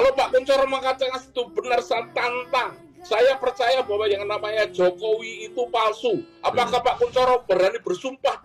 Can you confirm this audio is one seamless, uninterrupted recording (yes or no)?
yes